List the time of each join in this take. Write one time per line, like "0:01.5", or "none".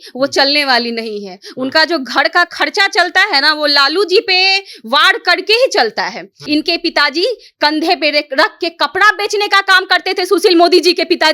0:06.4